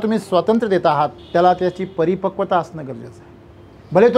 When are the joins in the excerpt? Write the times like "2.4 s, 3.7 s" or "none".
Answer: 1.2 s